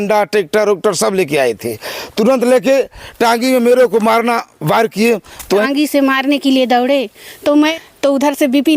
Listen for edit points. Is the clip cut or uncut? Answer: cut